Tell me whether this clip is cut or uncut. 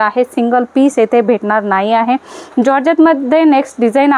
uncut